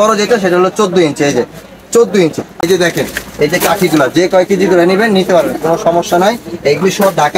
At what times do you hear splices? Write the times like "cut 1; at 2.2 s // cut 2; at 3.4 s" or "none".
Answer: cut 1; at 2.5 s